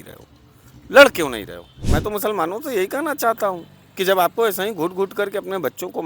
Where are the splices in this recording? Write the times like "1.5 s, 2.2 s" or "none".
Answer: 1.9 s